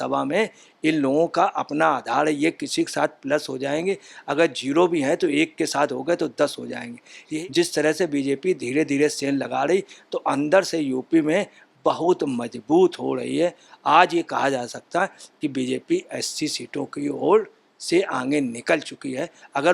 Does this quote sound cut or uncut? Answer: cut